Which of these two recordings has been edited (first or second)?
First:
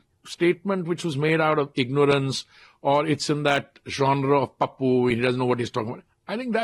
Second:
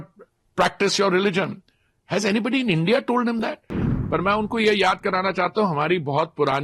second